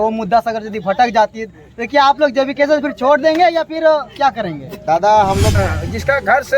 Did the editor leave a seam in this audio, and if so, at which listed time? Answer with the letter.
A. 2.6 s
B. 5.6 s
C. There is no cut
B